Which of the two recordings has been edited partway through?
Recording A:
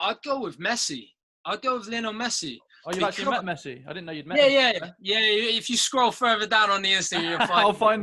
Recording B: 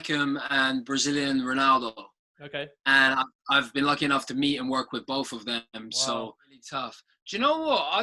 B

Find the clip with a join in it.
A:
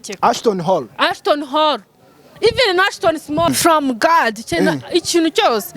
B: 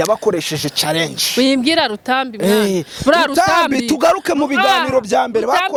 A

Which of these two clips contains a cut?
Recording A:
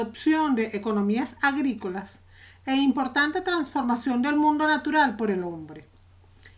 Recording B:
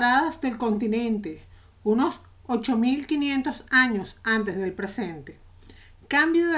A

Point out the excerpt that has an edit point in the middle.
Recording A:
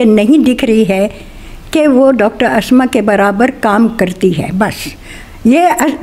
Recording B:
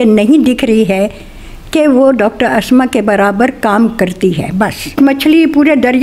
B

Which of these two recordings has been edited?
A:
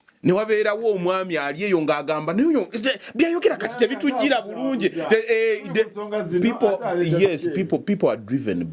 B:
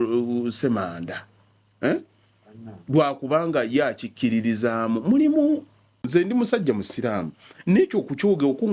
B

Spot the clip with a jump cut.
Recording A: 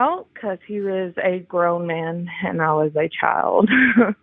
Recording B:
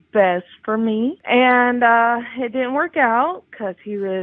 B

